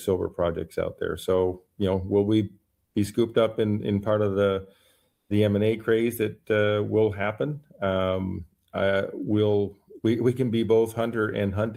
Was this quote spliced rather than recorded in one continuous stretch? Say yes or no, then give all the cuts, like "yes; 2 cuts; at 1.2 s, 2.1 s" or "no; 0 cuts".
no; 0 cuts